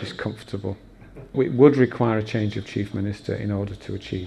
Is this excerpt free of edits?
no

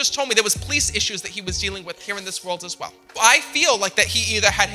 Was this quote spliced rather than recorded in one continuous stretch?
yes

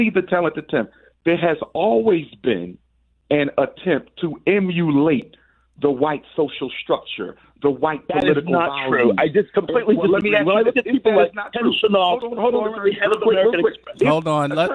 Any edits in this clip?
no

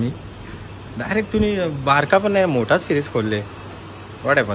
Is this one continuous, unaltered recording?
yes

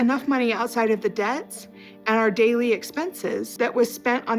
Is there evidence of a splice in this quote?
yes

